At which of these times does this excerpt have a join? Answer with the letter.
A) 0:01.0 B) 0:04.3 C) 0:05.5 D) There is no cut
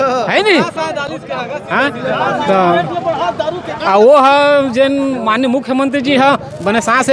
D